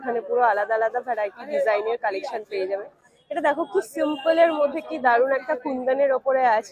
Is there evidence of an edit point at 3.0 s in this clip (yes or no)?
no